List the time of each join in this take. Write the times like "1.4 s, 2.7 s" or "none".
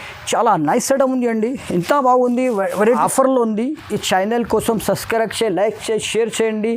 3.0 s